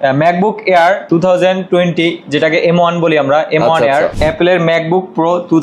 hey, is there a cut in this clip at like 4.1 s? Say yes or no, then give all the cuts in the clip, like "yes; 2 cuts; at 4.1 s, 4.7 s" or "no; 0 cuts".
yes; 1 cut; at 4.1 s